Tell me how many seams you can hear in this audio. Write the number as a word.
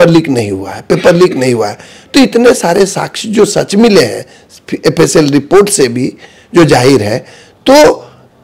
zero